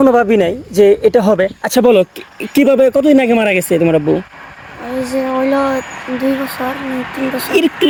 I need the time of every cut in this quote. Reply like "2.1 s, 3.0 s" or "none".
none